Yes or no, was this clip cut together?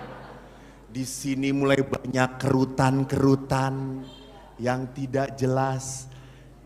no